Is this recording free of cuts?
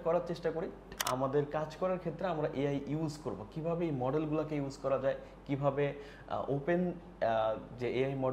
no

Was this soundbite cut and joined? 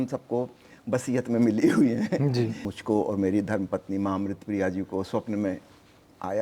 yes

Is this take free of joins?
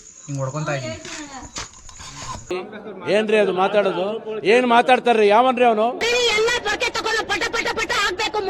yes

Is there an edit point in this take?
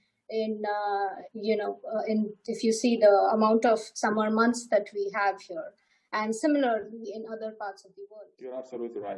yes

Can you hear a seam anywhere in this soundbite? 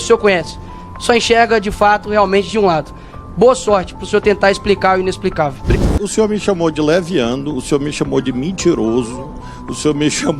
yes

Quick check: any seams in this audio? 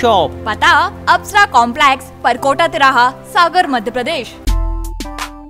yes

